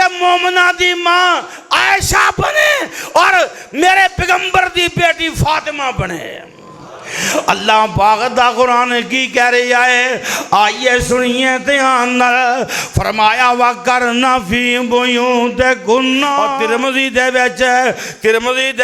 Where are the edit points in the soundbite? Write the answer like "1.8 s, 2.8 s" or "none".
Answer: 16.5 s